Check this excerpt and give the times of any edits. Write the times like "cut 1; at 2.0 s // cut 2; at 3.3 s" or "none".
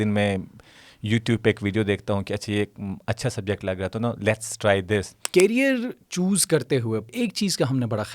cut 1; at 5.2 s // cut 2; at 7.1 s